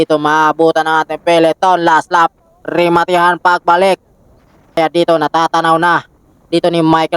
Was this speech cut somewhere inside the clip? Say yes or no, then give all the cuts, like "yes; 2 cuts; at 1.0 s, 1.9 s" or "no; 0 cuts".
yes; 1 cut; at 4.8 s